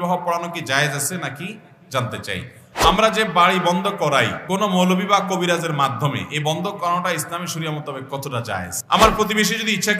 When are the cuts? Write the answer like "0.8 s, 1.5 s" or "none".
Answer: 2.6 s, 4.4 s, 8.8 s